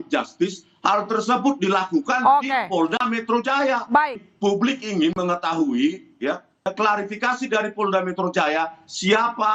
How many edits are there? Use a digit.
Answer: 2